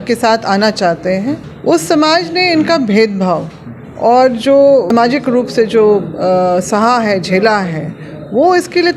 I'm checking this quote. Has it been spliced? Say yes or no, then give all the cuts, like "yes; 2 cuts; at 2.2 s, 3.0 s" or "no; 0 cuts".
yes; 2 cuts; at 1.5 s, 4.9 s